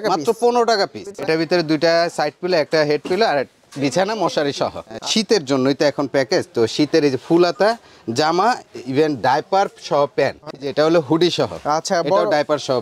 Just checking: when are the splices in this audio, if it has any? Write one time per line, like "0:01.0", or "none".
0:01.2
0:05.0
0:10.6